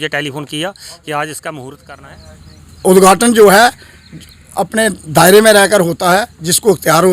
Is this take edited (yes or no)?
yes